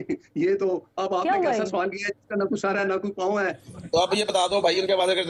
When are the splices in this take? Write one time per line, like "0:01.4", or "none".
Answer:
0:03.7